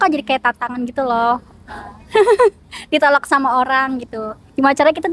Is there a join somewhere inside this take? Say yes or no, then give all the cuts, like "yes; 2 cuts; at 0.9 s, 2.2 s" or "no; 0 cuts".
no; 0 cuts